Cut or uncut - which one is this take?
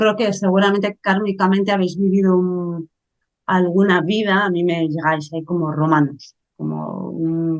uncut